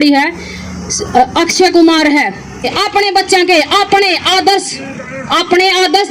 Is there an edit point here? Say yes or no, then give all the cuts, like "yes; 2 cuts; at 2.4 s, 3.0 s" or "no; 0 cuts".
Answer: yes; 1 cut; at 2.8 s